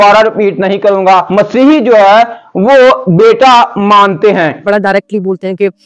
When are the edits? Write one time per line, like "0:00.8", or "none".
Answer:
0:01.3
0:04.6